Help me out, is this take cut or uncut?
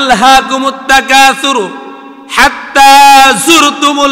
uncut